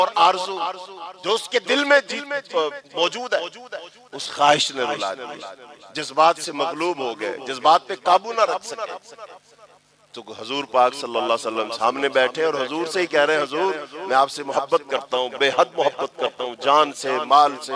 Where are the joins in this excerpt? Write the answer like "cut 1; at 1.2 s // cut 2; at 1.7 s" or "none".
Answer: none